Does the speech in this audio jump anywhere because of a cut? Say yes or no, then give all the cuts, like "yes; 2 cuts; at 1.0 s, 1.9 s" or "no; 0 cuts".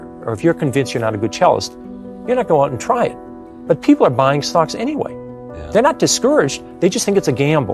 no; 0 cuts